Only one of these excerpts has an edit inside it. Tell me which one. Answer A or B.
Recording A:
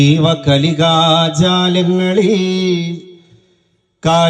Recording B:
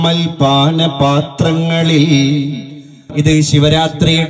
B